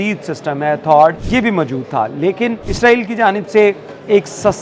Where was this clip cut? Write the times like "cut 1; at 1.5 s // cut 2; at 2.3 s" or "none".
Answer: cut 1; at 1.2 s // cut 2; at 2.7 s